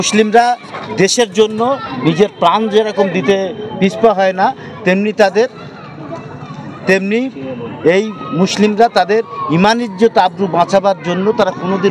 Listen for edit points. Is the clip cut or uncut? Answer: uncut